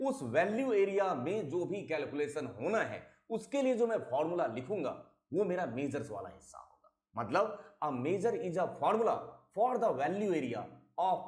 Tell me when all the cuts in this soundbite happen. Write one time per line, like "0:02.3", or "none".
0:07.3